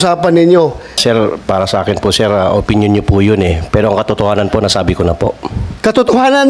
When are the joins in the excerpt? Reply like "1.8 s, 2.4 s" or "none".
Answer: 1.0 s